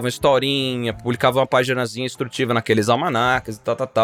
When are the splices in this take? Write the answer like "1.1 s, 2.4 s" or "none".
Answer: none